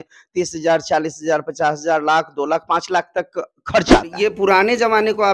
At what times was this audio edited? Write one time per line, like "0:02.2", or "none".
0:04.2